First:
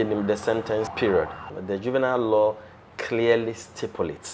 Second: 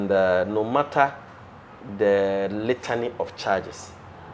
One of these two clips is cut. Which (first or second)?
first